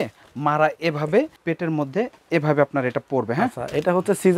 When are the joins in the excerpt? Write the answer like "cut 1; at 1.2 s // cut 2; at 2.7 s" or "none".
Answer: cut 1; at 1.4 s